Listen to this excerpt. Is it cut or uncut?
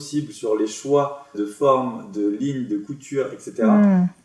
cut